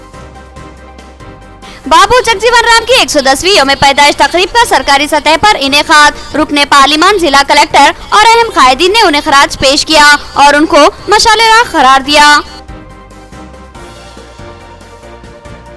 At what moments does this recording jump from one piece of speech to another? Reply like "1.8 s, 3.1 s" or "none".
1.4 s